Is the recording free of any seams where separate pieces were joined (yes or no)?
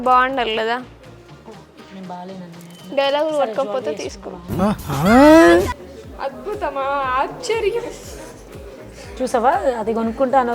no